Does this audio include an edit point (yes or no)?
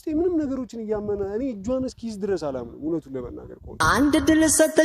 yes